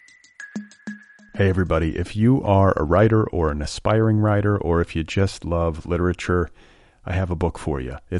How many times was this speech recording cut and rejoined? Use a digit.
1